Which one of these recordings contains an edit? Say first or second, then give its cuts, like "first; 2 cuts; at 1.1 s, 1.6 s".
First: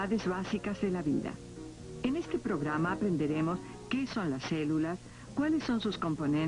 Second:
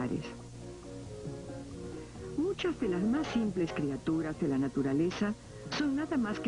second; 1 cut; at 5.0 s